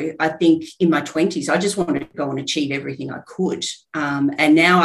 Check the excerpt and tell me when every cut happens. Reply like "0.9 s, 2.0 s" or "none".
2.1 s